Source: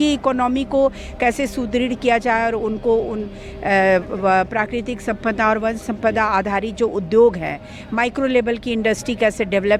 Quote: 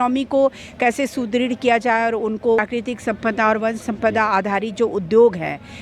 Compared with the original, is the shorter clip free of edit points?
no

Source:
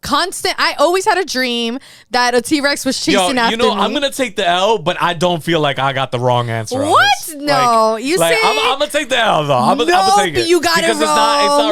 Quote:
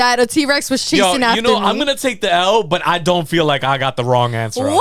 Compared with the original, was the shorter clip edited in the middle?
no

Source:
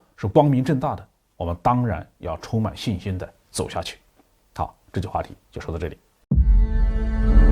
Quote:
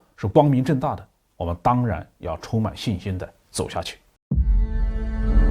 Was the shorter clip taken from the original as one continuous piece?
no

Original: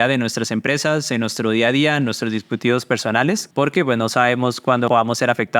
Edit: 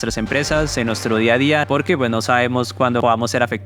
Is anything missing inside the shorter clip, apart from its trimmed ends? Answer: yes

